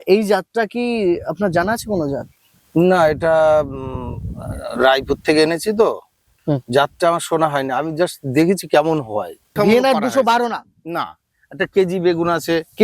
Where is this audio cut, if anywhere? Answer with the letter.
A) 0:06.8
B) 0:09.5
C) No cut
B